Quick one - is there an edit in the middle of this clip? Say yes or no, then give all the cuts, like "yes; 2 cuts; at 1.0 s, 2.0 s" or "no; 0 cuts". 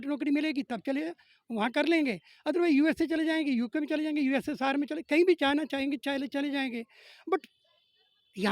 no; 0 cuts